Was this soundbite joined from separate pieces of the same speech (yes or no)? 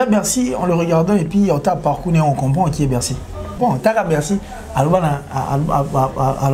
yes